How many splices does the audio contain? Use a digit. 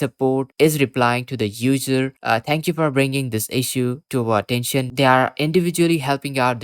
1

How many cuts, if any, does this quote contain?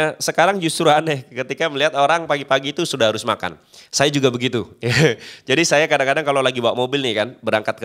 0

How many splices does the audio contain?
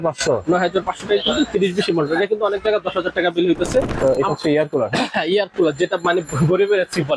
1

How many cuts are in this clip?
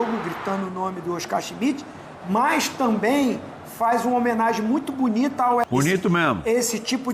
1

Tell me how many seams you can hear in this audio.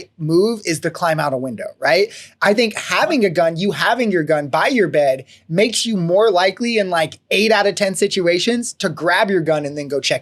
0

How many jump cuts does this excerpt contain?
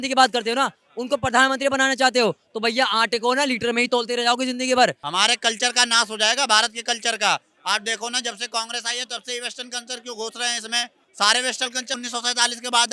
3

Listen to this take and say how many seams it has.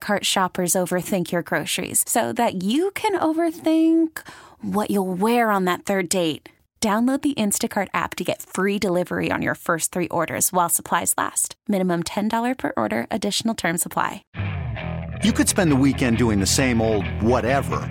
1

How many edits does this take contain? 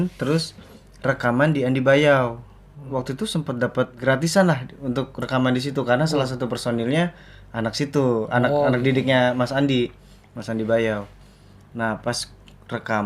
0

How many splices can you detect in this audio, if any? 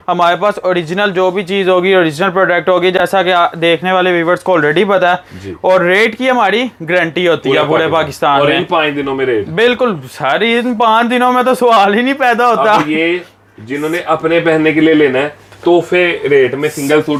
0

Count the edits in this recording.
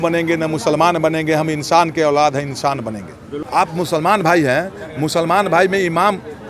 1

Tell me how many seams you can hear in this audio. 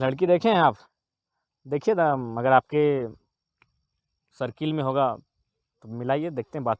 0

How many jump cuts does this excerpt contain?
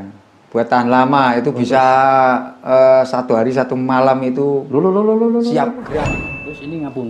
1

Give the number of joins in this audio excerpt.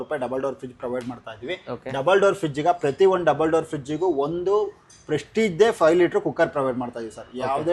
0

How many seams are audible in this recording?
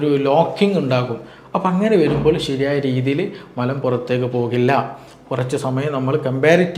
0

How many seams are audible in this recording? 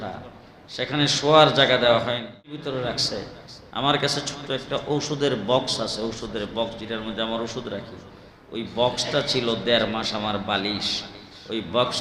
1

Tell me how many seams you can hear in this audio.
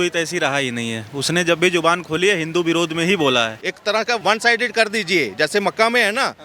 1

